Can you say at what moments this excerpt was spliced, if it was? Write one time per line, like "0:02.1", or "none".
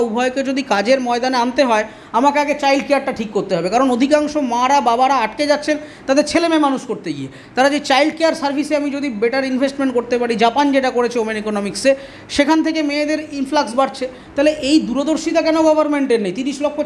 none

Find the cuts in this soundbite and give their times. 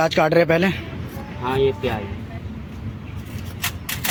none

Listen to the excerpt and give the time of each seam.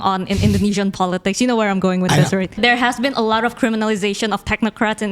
0:02.6

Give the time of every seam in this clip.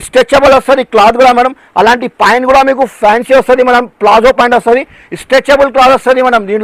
none

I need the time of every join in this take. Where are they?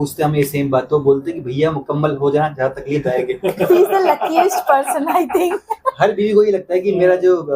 none

